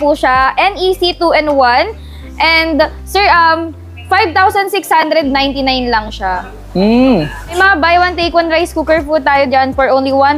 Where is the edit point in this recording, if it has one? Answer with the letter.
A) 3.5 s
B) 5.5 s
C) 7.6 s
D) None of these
C